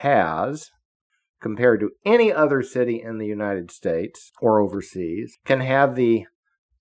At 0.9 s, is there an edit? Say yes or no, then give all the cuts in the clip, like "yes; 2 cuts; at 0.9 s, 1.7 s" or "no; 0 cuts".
no; 2 cuts; at 4.2 s, 5.3 s